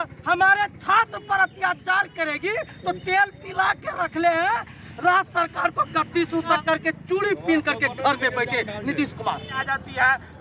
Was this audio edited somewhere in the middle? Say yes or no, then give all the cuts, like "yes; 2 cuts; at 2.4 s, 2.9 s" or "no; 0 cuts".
yes; 2 cuts; at 6.6 s, 9.6 s